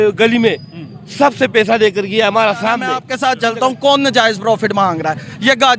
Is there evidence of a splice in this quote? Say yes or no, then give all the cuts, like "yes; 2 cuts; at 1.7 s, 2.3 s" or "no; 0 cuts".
yes; 1 cut; at 3.1 s